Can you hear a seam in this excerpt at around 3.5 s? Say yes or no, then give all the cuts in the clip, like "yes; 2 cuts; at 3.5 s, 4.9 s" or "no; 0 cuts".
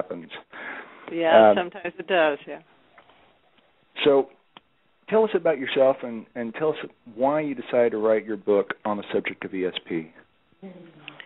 no; 0 cuts